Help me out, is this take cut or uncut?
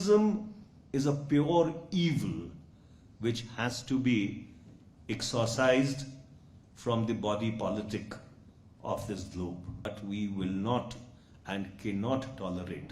cut